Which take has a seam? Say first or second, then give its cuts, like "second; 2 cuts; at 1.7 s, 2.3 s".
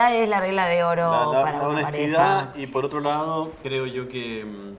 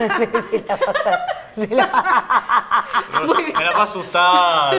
first; 1 cut; at 3.6 s